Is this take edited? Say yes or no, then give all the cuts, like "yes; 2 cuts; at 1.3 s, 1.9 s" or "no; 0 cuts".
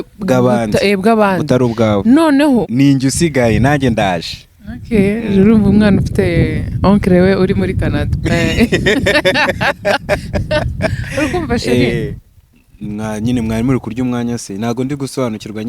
yes; 2 cuts; at 2.7 s, 12.2 s